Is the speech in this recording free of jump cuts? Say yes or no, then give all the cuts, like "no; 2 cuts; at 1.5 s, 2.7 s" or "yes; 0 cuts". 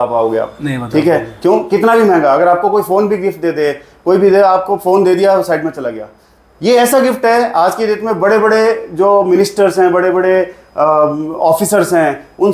yes; 0 cuts